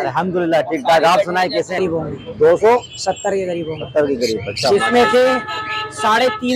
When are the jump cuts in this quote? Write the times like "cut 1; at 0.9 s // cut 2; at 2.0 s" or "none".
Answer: cut 1; at 1.8 s